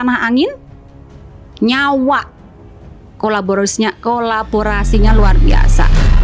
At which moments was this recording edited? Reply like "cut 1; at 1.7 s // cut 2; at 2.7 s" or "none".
none